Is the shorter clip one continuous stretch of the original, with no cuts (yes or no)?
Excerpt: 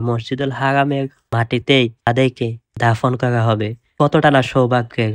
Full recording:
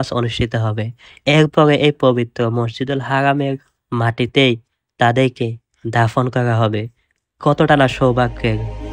no